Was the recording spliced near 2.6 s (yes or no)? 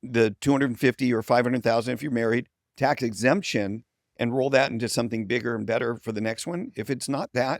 yes